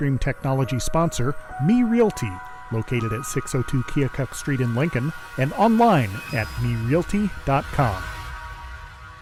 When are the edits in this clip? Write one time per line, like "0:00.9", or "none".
none